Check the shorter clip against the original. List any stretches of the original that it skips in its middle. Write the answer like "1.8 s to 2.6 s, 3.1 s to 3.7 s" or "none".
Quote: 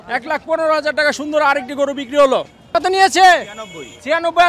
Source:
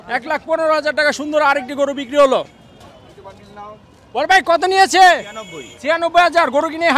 2.8 s to 4.5 s